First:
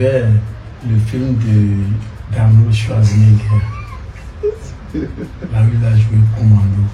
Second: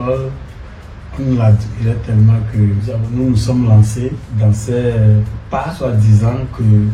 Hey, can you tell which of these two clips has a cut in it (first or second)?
second